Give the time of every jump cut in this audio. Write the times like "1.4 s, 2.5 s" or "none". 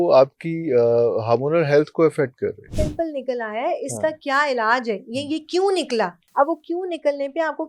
2.7 s, 6.2 s